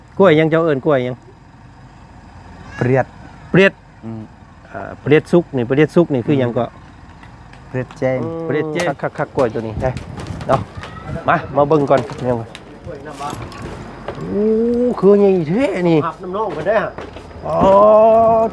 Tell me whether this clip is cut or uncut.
cut